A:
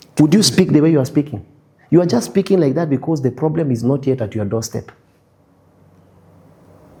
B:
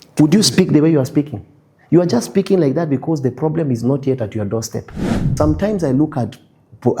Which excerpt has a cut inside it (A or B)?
B